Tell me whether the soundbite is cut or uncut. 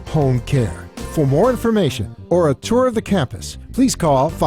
uncut